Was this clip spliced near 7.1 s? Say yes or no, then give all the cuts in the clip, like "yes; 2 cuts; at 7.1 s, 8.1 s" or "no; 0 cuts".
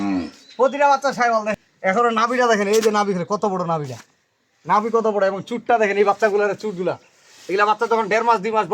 no; 1 cut; at 1.6 s